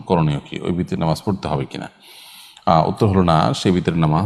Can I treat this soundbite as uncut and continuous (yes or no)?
yes